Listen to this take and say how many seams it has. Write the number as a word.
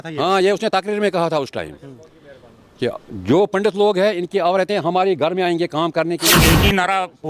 one